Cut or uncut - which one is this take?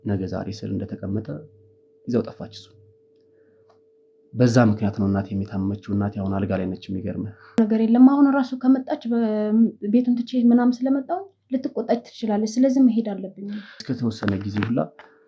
cut